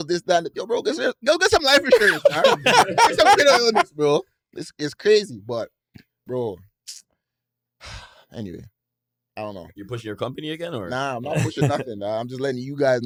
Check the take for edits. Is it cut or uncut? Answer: uncut